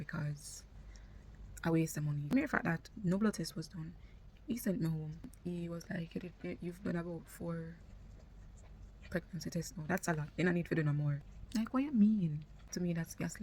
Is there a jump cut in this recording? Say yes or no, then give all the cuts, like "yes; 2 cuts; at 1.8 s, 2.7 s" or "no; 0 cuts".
yes; 4 cuts; at 2.2 s, 5.3 s, 11.3 s, 12.6 s